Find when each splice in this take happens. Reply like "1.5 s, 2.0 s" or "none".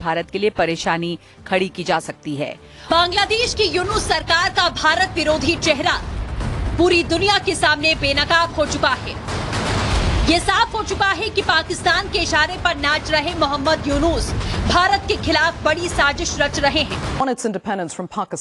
2.8 s, 17.2 s